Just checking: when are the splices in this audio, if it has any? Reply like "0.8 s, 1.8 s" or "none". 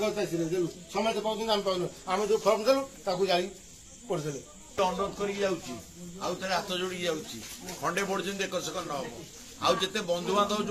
4.8 s